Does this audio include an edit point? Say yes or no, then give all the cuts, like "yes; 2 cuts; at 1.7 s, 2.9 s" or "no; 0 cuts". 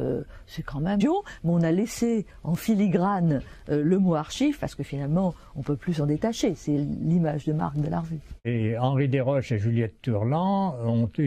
no; 0 cuts